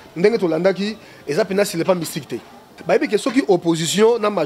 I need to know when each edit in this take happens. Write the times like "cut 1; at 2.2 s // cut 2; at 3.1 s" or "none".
cut 1; at 2.7 s